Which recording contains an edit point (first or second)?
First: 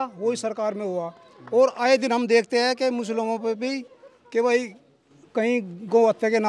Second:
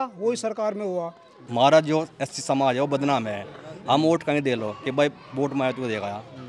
second